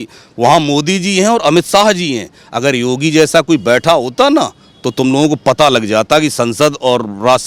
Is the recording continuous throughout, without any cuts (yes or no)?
yes